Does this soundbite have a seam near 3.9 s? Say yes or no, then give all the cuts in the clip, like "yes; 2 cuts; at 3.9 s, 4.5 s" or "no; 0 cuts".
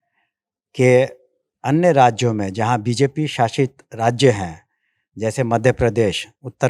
no; 0 cuts